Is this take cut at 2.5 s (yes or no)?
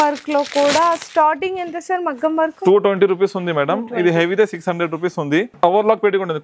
no